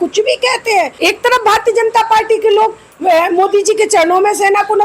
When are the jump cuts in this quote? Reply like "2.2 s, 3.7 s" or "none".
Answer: 0.9 s